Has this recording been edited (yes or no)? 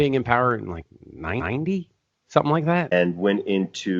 yes